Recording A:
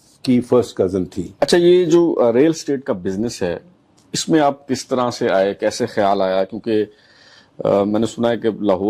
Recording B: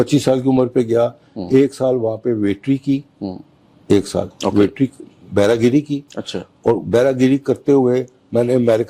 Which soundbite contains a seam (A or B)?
A